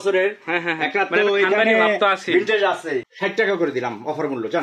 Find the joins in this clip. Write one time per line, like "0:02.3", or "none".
0:03.1